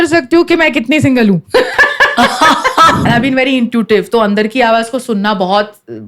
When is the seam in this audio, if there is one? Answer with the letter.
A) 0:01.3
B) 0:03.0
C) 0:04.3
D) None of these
B